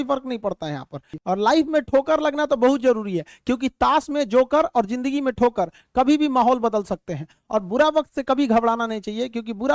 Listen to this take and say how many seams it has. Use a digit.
1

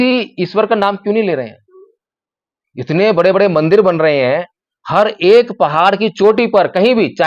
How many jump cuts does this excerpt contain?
0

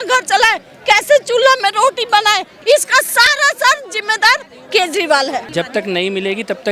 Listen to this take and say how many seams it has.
2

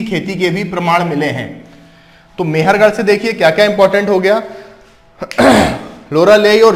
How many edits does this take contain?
0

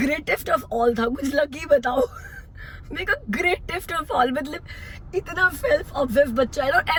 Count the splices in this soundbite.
0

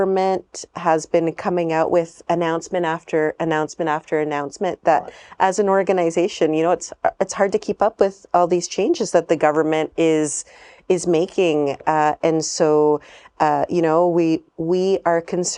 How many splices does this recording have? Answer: 0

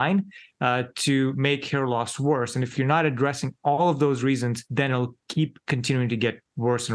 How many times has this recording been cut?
1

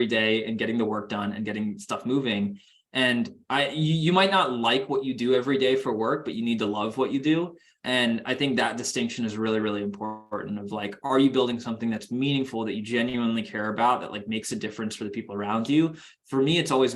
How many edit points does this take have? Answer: 1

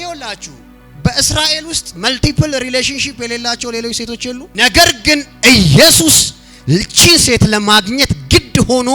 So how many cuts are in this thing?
1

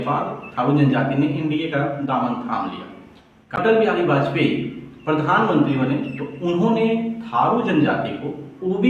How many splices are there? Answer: 1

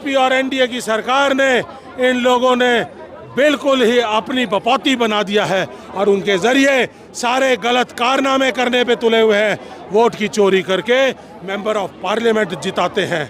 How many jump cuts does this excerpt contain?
0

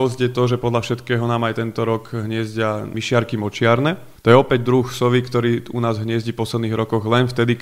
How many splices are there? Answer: 2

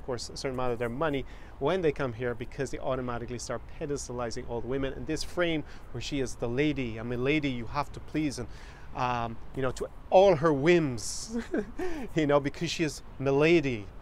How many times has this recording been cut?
0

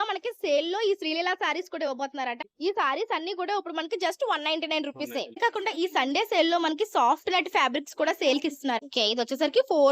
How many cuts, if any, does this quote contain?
3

